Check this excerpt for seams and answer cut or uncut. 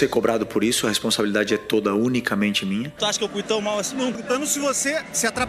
cut